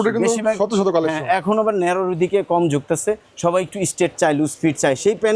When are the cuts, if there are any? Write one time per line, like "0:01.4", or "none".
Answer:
none